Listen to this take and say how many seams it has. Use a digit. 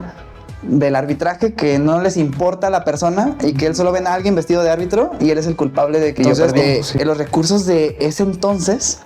1